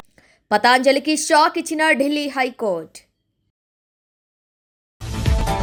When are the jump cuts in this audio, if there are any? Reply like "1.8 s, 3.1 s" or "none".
none